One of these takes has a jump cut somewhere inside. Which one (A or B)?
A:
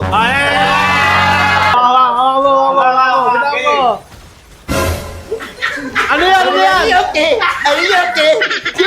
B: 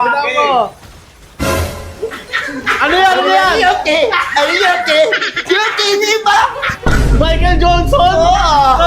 A